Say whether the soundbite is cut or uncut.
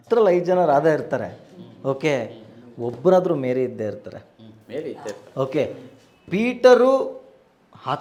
uncut